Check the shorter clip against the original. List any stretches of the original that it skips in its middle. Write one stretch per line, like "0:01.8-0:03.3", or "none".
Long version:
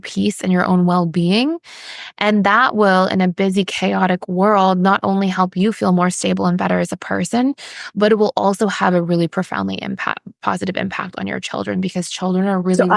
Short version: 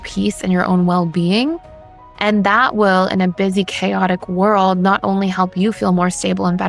none